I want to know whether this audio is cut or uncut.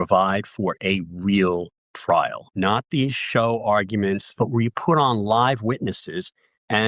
cut